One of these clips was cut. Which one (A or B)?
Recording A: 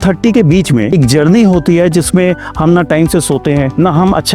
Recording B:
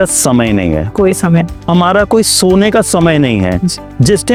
A